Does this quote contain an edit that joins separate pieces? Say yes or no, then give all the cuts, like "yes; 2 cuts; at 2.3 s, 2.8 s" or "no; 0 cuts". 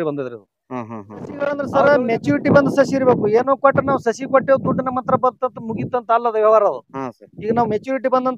yes; 1 cut; at 1.6 s